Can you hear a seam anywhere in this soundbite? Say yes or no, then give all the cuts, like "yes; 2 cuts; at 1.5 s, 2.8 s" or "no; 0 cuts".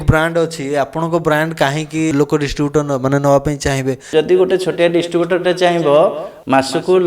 yes; 2 cuts; at 2.1 s, 4.0 s